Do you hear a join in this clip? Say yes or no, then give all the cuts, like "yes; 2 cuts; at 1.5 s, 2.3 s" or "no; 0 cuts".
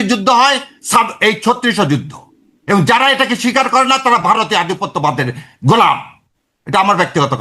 no; 0 cuts